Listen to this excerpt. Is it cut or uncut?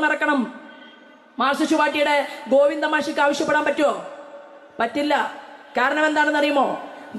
uncut